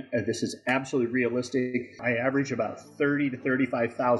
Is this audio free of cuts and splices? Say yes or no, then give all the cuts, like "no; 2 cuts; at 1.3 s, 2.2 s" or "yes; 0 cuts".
no; 1 cut; at 2.0 s